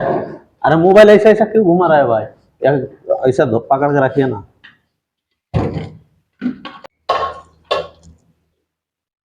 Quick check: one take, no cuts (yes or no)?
no